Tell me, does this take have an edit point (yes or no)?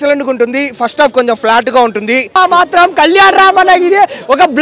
yes